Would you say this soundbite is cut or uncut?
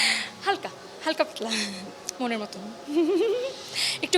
cut